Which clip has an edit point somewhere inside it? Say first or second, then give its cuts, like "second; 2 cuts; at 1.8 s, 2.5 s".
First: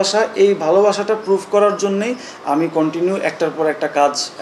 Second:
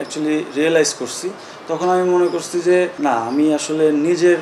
second; 1 cut; at 2.9 s